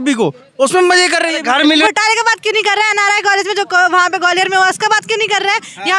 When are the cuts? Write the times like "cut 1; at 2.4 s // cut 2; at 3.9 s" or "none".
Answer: cut 1; at 1.8 s